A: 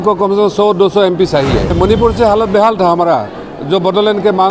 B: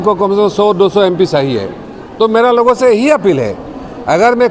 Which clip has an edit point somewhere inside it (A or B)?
A